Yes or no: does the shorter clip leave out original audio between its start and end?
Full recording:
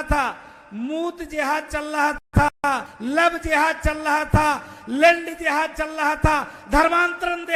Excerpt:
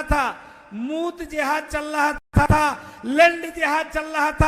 yes